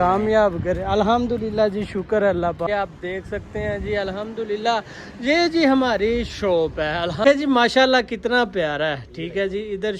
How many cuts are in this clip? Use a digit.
2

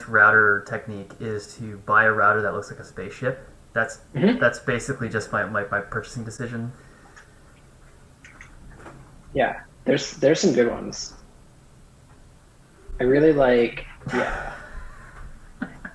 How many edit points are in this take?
0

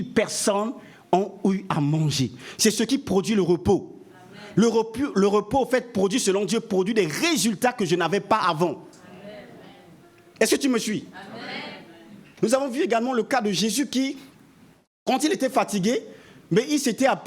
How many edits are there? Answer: 1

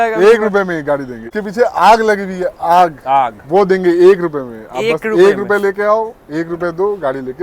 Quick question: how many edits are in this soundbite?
1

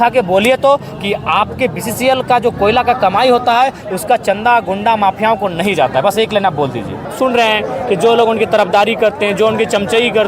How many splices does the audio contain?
1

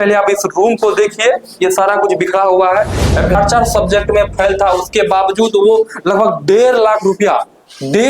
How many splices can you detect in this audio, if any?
1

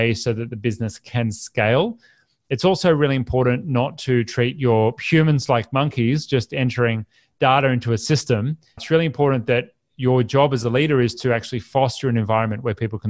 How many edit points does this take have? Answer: 0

